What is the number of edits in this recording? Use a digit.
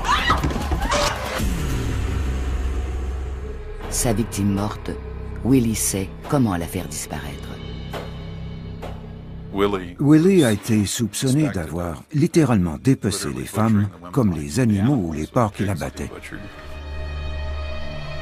1